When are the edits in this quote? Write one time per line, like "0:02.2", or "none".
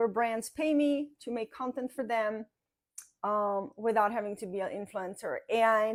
none